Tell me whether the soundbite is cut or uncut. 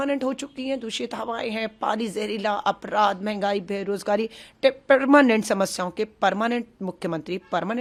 uncut